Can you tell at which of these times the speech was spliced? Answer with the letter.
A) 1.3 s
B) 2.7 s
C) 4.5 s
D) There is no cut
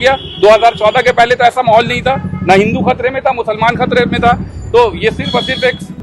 D